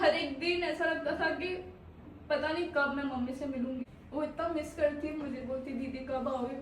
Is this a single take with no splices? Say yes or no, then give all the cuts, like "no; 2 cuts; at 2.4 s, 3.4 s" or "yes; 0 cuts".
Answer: no; 1 cut; at 3.9 s